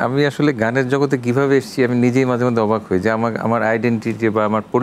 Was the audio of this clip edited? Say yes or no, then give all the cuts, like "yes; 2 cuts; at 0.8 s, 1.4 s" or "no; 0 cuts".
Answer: no; 0 cuts